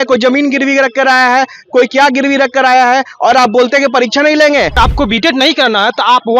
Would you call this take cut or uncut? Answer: cut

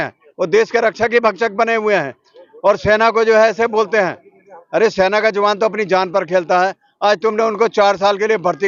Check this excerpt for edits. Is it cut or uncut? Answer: uncut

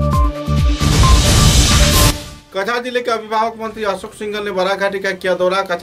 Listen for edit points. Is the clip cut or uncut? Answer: uncut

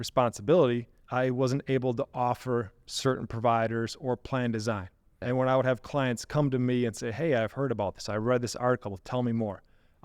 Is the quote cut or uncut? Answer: cut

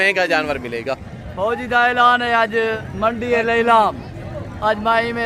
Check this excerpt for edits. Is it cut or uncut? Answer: cut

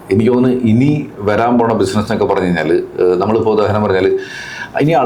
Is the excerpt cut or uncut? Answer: uncut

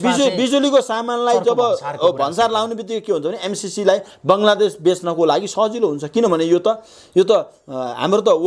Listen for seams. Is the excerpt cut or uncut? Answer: uncut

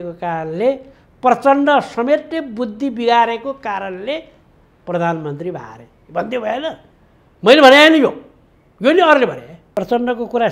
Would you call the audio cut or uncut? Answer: cut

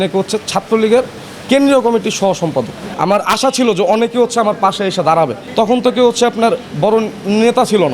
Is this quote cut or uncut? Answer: cut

